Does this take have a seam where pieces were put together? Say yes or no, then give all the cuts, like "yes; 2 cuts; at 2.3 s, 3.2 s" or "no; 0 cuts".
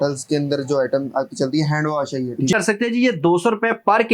yes; 1 cut; at 2.5 s